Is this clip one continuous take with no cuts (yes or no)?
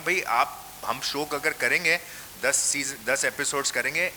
yes